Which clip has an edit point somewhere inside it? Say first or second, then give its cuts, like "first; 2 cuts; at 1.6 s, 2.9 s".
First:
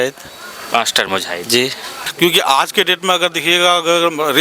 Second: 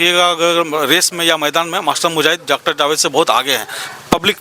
first; 1 cut; at 1.9 s